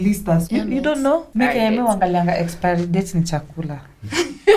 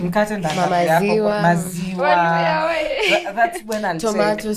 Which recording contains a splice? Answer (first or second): first